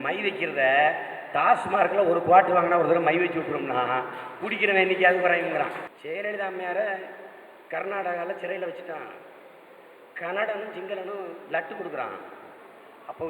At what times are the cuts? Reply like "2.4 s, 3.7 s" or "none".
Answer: 5.9 s